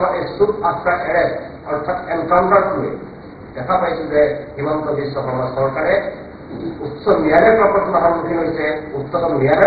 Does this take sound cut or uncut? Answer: uncut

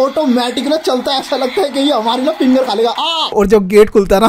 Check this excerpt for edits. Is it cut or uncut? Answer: cut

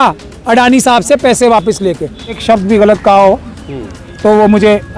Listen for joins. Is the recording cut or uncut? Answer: cut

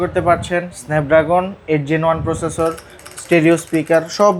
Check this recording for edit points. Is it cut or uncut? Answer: uncut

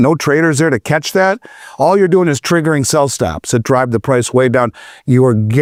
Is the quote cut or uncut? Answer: uncut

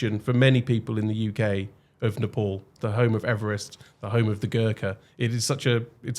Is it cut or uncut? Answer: uncut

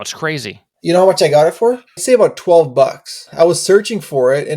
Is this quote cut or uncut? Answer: cut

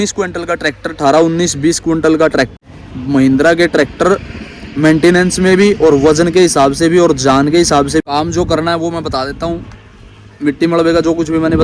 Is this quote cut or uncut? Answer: cut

